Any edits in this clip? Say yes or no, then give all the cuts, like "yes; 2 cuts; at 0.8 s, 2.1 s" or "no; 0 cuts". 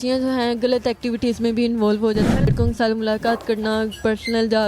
yes; 1 cut; at 2.5 s